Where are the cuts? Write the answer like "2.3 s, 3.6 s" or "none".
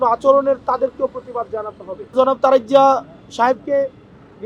2.1 s